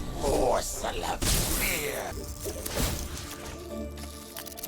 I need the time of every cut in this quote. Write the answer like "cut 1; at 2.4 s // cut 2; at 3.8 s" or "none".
cut 1; at 2.1 s